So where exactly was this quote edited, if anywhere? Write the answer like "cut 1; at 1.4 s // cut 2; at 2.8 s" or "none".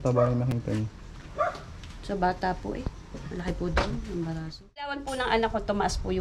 cut 1; at 5.0 s

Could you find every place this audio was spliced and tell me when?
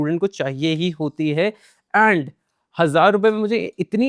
none

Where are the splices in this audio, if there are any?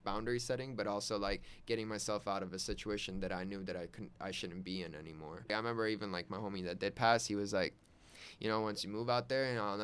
cut 1; at 5.5 s

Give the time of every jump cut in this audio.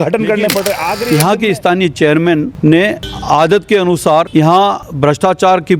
cut 1; at 0.9 s // cut 2; at 2.9 s // cut 3; at 4.6 s

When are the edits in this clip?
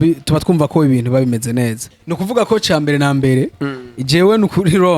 cut 1; at 1.8 s

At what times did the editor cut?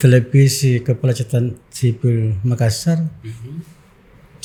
none

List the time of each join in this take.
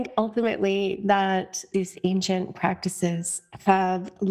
cut 1; at 1.7 s

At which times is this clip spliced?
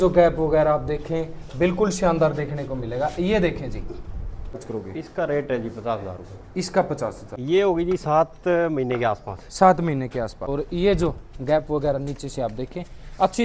cut 1; at 4.7 s // cut 2; at 7.3 s // cut 3; at 10.4 s

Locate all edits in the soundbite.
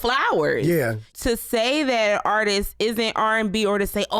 cut 1; at 1.0 s

